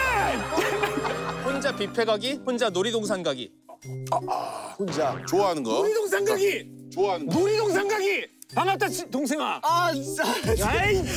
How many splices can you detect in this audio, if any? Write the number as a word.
one